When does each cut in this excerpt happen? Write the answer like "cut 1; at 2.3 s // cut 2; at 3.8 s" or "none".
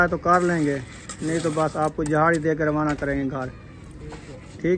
none